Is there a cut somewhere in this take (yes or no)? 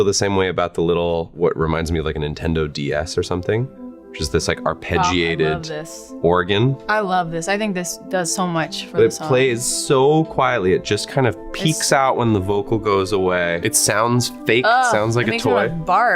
yes